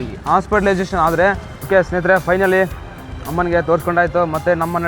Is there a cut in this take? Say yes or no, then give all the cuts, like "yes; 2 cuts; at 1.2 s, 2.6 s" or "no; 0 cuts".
yes; 1 cut; at 1.5 s